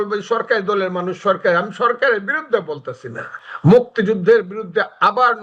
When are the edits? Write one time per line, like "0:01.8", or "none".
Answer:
0:03.4